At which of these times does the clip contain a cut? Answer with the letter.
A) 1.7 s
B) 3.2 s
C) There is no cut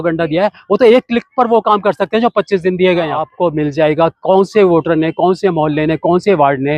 B